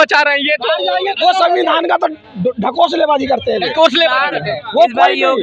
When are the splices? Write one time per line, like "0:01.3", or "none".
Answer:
none